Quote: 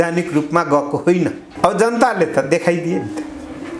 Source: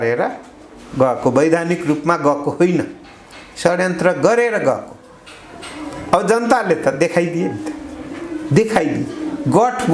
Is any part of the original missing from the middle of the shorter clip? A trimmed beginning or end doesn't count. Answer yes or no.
yes